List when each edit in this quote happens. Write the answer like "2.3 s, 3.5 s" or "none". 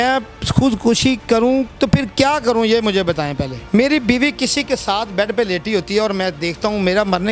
1.7 s, 3.5 s